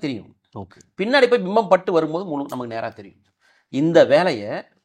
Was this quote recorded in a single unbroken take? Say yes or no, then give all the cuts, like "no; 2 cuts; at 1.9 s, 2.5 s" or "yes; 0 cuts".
yes; 0 cuts